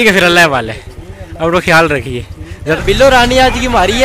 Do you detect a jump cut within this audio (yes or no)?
yes